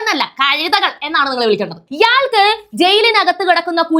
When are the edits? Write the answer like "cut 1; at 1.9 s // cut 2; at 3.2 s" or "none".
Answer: cut 1; at 1.9 s